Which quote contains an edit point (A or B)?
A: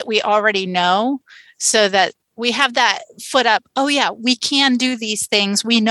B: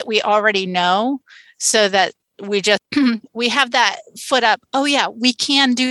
A